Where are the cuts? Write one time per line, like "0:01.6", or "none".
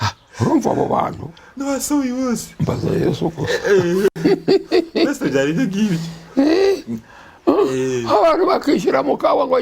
none